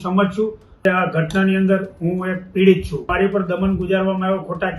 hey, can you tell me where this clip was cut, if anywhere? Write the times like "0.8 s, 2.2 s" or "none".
0.8 s, 3.1 s